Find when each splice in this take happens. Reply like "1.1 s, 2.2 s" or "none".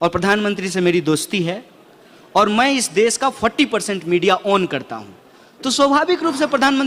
none